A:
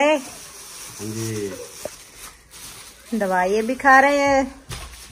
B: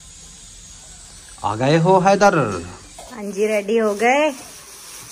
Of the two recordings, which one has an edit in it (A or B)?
B